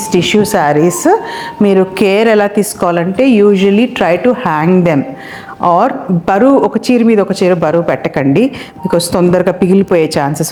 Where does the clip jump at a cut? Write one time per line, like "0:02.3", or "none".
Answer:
none